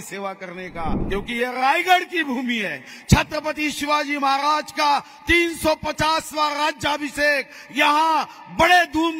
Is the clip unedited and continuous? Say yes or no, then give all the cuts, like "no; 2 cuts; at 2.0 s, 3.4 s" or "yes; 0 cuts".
no; 1 cut; at 1.0 s